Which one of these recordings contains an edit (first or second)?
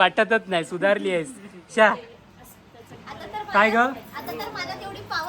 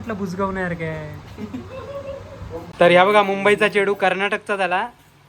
second